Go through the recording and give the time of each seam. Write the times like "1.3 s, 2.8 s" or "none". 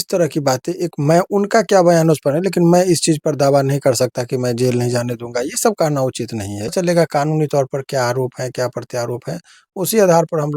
6.7 s